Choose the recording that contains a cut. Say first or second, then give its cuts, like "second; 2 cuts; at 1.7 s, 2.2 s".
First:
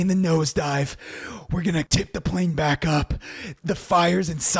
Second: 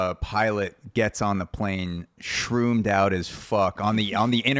first; 2 cuts; at 1.9 s, 3.5 s